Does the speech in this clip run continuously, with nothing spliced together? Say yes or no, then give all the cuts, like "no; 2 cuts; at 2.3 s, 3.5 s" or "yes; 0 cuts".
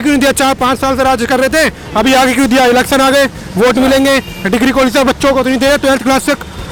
yes; 0 cuts